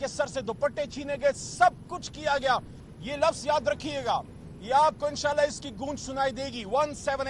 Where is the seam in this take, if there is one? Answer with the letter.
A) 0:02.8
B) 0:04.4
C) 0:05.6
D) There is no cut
A